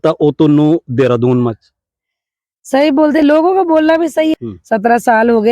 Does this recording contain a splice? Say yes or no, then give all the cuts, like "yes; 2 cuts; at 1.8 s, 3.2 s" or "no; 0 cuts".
yes; 1 cut; at 4.3 s